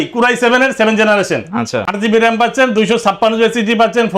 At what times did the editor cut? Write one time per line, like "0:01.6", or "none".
none